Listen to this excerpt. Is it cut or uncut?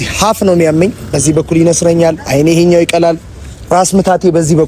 uncut